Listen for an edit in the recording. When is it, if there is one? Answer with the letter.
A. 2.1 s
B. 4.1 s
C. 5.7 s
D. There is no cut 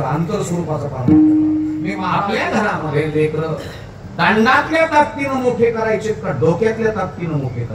A